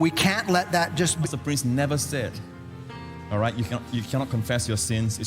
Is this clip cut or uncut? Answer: cut